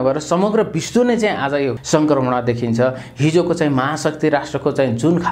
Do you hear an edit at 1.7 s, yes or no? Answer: yes